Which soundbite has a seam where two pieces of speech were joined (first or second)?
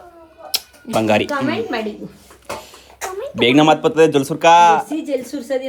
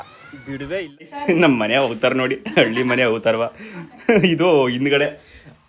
second